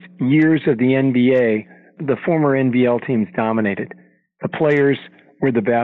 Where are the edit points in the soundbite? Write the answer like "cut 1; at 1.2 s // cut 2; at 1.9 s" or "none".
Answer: cut 1; at 2.0 s